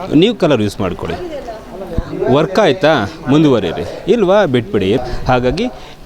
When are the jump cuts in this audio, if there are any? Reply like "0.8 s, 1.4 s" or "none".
5.0 s